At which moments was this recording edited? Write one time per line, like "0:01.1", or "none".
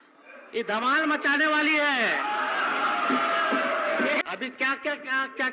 0:04.2